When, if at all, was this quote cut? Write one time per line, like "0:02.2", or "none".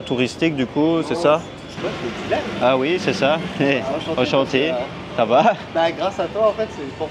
0:01.7